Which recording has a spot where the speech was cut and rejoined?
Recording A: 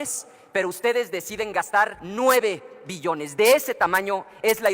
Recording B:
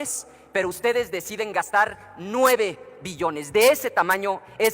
A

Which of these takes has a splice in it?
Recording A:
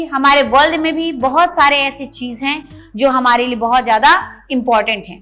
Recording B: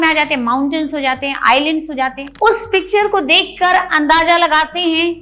B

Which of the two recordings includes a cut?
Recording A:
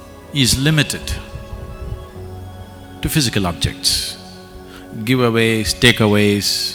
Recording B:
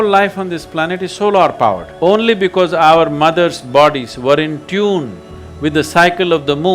B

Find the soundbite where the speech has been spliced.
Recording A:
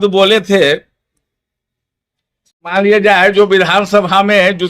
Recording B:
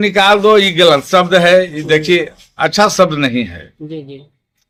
A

